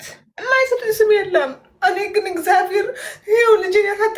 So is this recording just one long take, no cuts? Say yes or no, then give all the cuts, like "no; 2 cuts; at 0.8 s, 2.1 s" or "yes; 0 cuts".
yes; 0 cuts